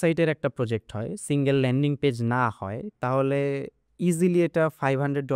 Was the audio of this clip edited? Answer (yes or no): no